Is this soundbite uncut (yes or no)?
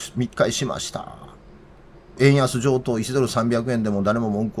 no